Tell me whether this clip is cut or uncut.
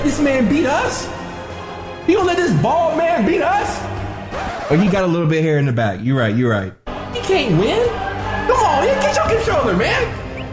uncut